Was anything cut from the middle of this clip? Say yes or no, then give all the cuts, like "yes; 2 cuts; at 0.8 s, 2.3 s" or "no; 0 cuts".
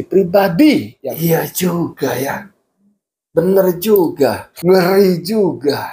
yes; 2 cuts; at 1.2 s, 4.5 s